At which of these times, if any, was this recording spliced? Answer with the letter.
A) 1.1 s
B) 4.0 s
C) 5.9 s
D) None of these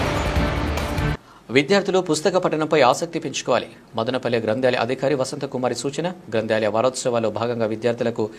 D